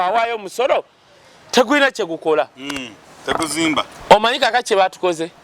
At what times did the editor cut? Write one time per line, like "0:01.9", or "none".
none